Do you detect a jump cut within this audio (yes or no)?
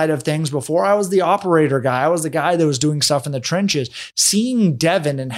no